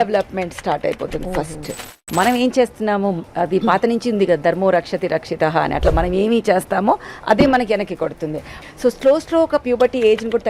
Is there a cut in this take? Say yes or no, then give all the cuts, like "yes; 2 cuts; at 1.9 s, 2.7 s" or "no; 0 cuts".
yes; 2 cuts; at 1.9 s, 8.5 s